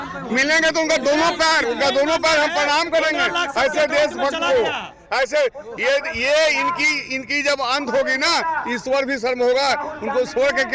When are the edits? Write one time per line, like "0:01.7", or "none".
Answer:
none

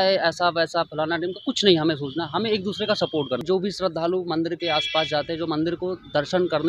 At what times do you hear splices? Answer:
0:03.4

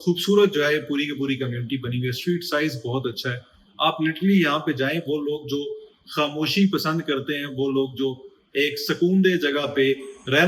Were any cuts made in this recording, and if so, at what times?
none

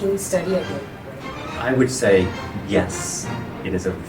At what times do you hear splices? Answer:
0:01.4

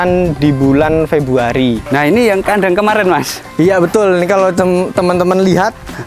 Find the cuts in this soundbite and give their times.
0:01.8

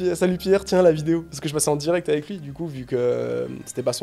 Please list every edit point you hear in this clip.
none

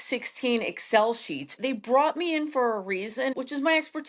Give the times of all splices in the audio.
0:01.6
0:03.3

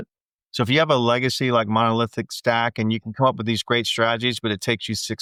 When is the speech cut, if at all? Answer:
none

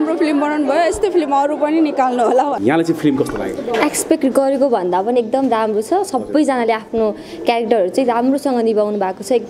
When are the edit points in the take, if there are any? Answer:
0:02.6

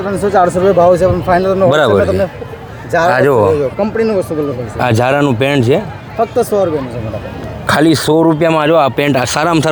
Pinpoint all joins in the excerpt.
none

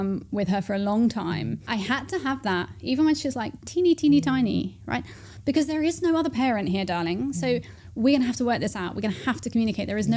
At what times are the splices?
none

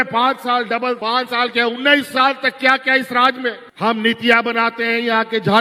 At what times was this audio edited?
none

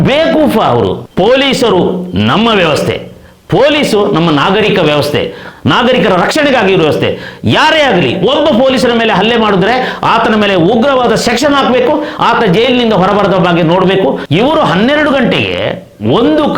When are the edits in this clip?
0:01.0
0:14.2

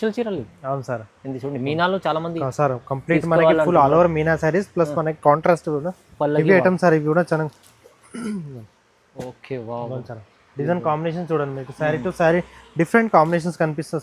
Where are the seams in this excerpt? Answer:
none

